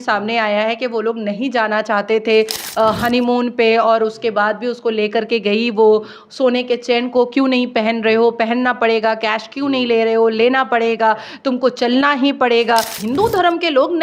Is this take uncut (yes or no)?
no